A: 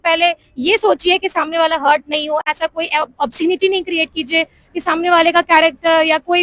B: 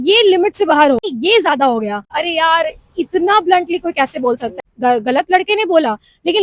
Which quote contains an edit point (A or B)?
B